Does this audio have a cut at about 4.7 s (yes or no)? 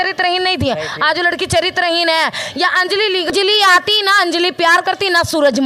no